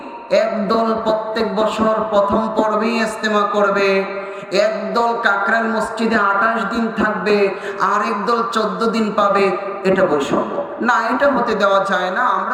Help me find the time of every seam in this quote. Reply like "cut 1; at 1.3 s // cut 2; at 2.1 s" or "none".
none

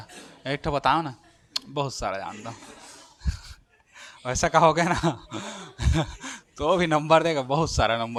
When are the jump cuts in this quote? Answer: none

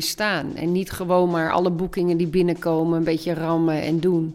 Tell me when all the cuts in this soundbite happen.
none

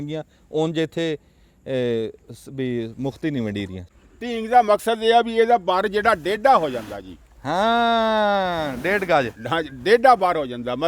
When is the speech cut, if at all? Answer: cut 1; at 3.8 s

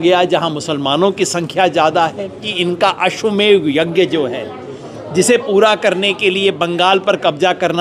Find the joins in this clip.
cut 1; at 2.5 s

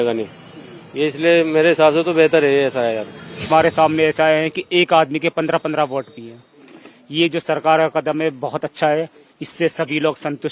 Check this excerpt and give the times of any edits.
cut 1; at 3.5 s

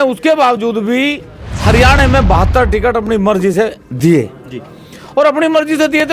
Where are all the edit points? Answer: none

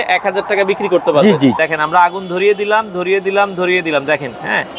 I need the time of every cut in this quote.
cut 1; at 1.6 s

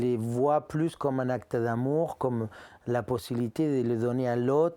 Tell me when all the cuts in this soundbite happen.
none

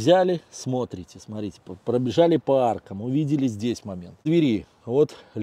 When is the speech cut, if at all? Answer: cut 1; at 4.3 s

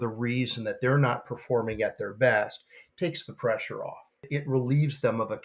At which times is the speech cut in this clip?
cut 1; at 4.3 s

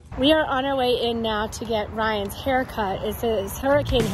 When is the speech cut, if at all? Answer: none

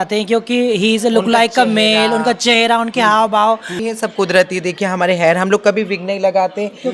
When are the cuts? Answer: cut 1; at 3.8 s

